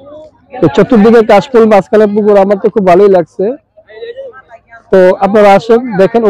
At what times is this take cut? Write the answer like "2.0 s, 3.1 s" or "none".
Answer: none